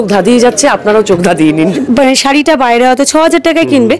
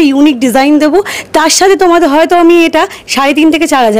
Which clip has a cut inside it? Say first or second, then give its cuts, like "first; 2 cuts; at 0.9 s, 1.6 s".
first; 1 cut; at 1.8 s